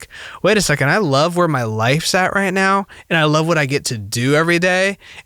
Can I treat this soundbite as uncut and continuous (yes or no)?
yes